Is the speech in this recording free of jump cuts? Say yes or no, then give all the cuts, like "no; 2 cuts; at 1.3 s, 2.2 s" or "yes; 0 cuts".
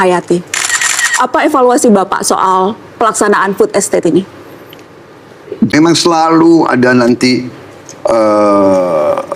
yes; 0 cuts